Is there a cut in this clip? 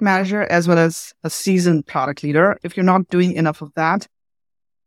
yes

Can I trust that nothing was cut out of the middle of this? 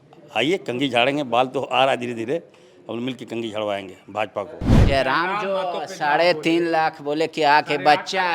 no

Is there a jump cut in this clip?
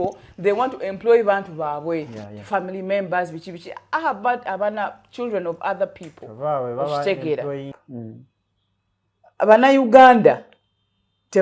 yes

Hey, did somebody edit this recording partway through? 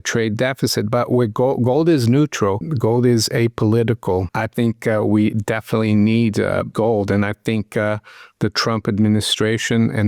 yes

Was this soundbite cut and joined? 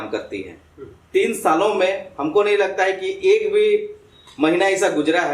yes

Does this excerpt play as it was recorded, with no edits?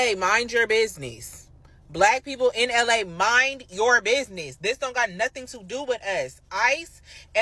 yes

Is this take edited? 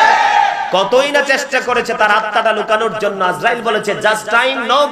no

